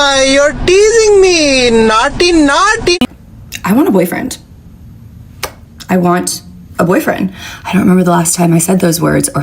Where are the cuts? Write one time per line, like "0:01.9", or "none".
0:03.0

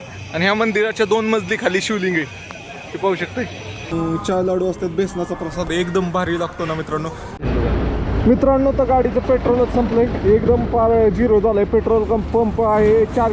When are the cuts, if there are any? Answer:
0:03.9
0:07.4

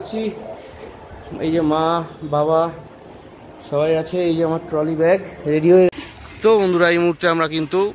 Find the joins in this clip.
0:05.9

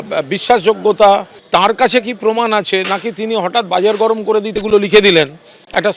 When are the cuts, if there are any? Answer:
0:01.3

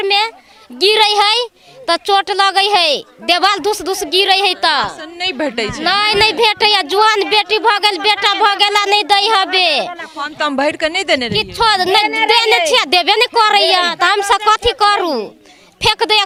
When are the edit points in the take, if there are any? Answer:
none

